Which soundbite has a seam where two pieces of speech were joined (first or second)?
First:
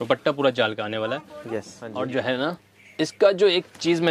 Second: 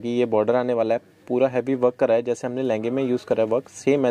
first